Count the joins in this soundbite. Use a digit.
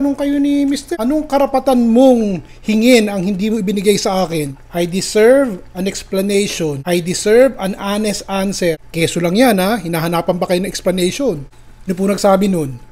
4